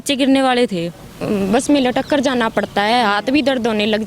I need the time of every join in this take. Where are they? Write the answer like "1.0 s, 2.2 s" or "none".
1.2 s